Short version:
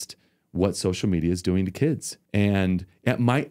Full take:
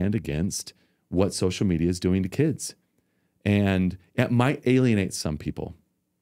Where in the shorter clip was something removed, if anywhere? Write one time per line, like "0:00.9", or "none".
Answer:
0:02.1